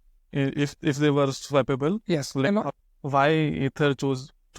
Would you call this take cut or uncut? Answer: cut